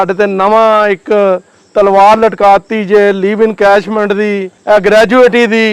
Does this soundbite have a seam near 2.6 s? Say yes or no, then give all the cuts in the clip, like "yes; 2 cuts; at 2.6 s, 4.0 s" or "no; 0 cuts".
no; 1 cut; at 4.5 s